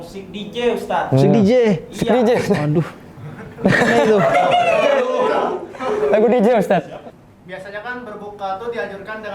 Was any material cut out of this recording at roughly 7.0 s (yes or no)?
yes